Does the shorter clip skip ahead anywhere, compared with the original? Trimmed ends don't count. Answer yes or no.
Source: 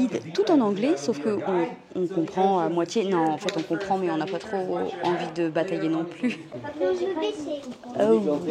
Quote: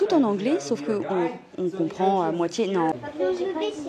yes